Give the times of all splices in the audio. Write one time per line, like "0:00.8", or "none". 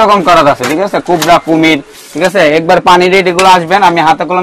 none